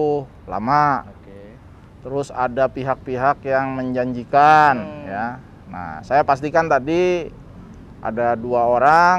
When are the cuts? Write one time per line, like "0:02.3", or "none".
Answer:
none